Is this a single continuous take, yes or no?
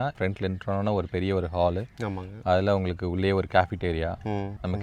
yes